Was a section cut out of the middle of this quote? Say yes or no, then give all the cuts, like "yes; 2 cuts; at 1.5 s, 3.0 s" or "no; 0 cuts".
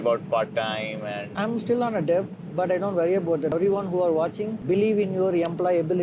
yes; 2 cuts; at 1.3 s, 3.5 s